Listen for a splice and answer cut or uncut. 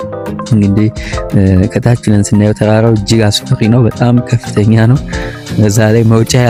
uncut